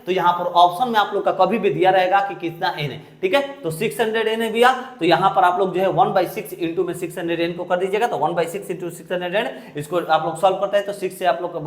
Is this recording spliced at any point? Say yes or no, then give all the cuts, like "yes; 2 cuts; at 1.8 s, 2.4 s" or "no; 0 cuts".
no; 0 cuts